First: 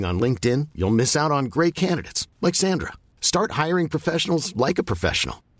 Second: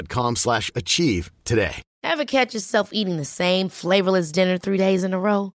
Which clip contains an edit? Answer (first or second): second